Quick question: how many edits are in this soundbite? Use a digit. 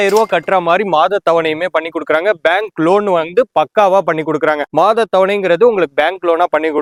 0